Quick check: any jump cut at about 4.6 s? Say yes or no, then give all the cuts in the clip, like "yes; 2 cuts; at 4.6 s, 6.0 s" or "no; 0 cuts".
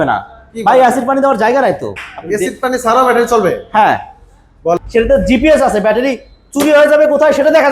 yes; 1 cut; at 4.6 s